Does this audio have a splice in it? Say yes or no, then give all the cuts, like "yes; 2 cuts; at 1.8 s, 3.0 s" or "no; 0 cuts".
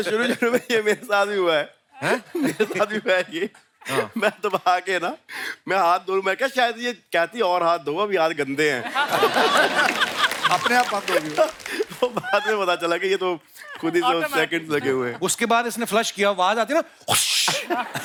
no; 0 cuts